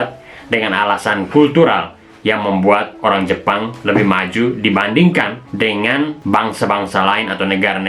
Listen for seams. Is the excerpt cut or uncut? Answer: cut